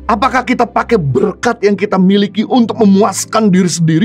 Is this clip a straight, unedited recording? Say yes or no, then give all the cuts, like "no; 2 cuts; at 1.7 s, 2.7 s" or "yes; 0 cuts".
yes; 0 cuts